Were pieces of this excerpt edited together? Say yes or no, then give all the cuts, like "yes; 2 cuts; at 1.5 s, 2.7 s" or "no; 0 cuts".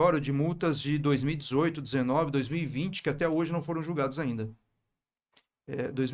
no; 0 cuts